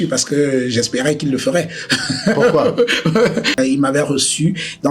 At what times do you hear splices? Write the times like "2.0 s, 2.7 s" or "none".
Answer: 3.5 s